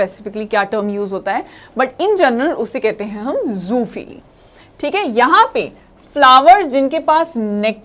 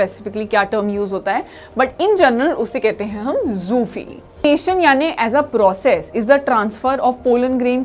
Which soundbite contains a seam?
second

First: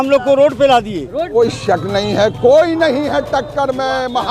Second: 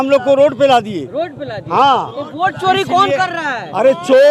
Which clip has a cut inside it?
first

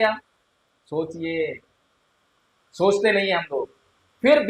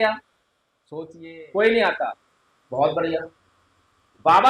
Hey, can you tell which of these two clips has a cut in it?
second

